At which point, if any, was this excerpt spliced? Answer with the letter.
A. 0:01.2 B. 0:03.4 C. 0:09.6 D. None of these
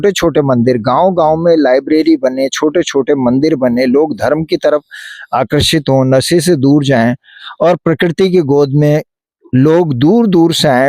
D